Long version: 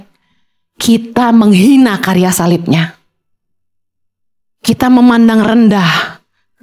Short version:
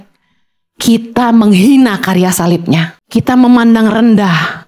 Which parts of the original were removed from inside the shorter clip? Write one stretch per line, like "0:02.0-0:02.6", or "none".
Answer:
0:03.0-0:04.5

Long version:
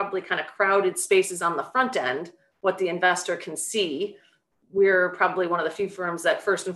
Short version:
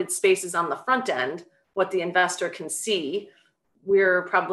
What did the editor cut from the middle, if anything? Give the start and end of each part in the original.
none

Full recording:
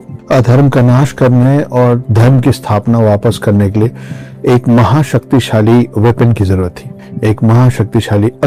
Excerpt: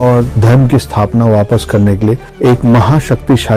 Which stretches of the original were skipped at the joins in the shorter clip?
0:04.0-0:04.3

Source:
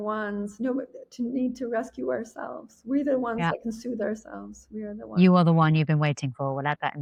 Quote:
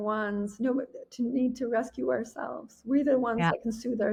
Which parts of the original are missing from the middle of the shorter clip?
none

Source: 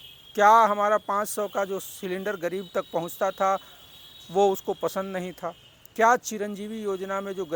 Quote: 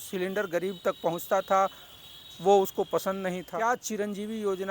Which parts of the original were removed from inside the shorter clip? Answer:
0:05.4-0:05.9

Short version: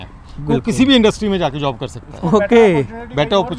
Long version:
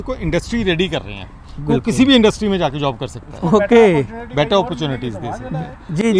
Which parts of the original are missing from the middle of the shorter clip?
none

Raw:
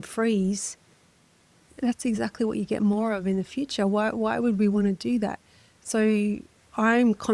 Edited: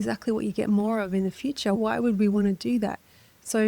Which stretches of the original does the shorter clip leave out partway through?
0:03.9-0:04.2

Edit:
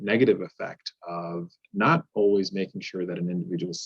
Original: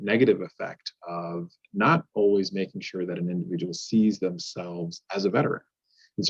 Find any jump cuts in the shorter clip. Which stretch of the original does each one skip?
none

